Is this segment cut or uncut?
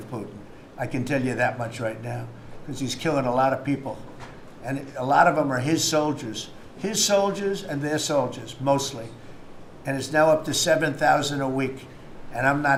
uncut